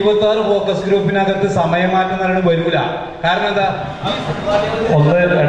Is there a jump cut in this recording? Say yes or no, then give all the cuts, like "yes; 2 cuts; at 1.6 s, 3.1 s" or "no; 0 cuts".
yes; 1 cut; at 4.0 s